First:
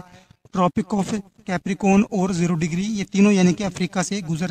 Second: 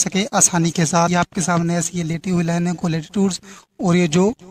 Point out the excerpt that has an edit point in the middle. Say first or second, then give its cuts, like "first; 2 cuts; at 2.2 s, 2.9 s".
second; 1 cut; at 1.1 s